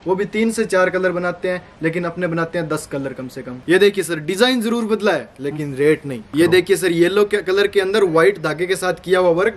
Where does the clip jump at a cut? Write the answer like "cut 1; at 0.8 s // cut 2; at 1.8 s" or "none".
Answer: cut 1; at 3.6 s // cut 2; at 6.3 s

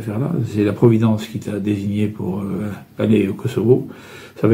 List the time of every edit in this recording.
none

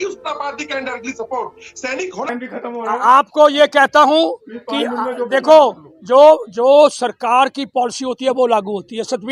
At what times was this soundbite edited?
cut 1; at 2.4 s

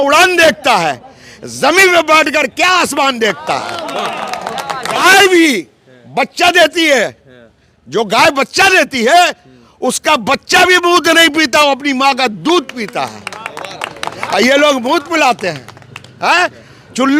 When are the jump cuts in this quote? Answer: cut 1; at 5.0 s

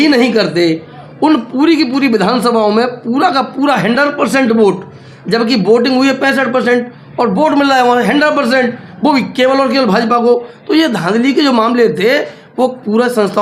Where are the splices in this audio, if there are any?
none

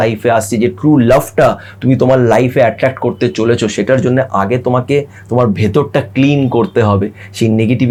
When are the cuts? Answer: none

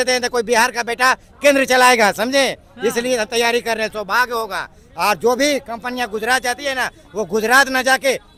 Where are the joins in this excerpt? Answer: none

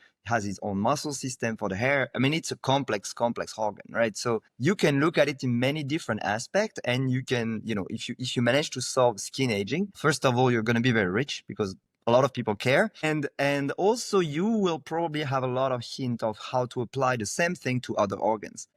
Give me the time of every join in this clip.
none

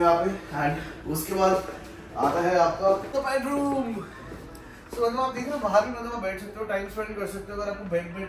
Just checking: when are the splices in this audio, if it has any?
cut 1; at 3.1 s

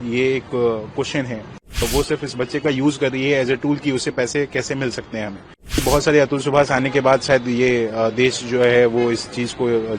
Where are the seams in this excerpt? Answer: cut 1; at 1.8 s // cut 2; at 5.8 s

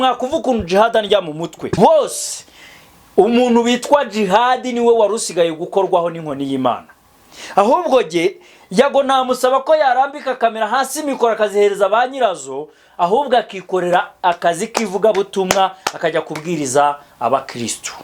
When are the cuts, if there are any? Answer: cut 1; at 1.8 s

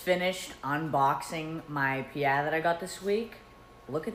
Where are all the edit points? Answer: none

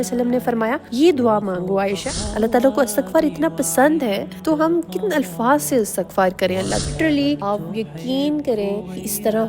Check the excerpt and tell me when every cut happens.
cut 1; at 2.1 s // cut 2; at 6.9 s

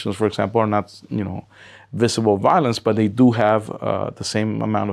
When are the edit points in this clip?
none

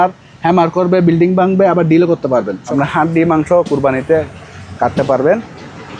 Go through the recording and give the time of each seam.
cut 1; at 2.6 s

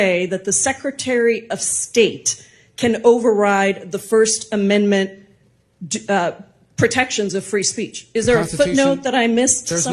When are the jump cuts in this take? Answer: none

